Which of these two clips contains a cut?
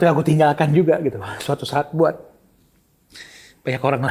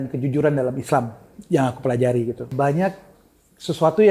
second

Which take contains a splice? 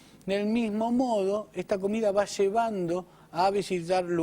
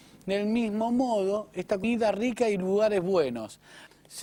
first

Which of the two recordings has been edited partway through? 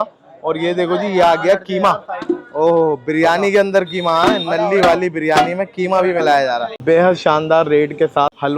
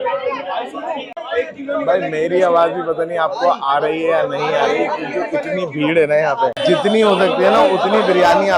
first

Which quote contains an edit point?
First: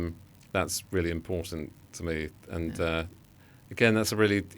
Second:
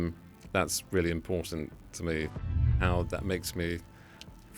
second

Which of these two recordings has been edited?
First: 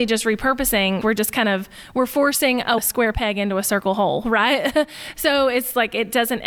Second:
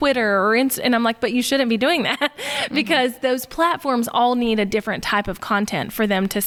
first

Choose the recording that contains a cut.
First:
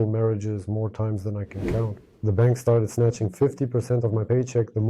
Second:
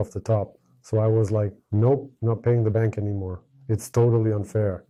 first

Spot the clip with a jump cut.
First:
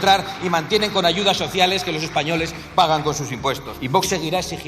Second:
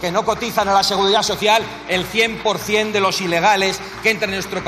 first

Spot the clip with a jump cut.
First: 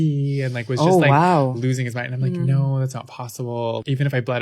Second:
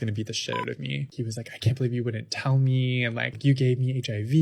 second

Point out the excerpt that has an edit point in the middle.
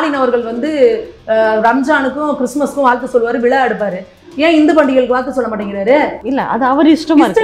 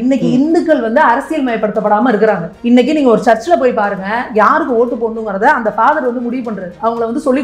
first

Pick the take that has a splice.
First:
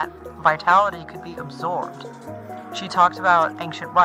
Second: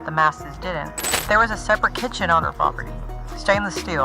second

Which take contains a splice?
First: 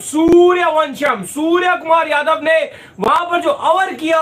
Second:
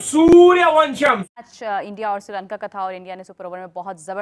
second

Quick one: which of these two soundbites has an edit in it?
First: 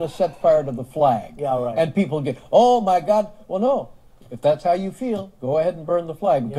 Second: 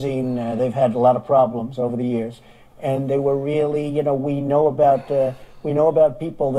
second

